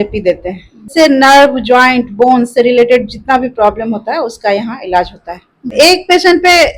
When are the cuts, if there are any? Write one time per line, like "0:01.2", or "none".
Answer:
0:00.9
0:05.7